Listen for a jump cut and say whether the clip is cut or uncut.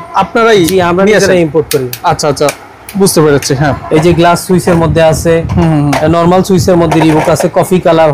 uncut